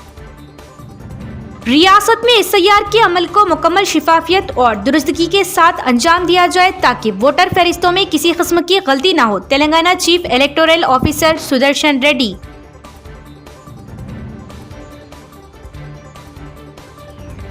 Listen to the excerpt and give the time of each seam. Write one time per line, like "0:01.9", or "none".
0:01.5